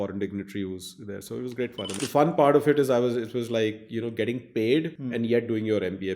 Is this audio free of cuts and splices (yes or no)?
no